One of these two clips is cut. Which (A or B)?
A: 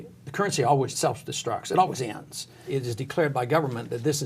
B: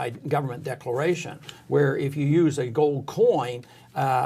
A